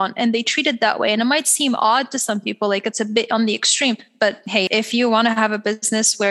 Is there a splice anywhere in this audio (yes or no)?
yes